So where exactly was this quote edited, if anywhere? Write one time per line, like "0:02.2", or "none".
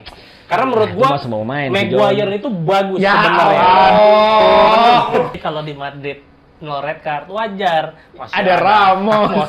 0:05.4